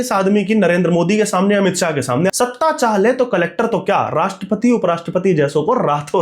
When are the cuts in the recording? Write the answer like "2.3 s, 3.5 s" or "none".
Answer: 2.3 s